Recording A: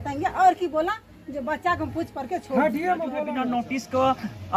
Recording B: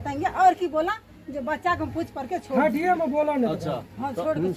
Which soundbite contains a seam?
A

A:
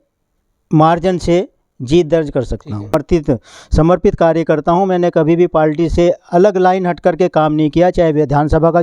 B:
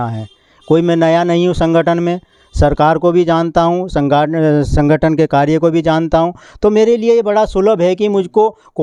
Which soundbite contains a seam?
A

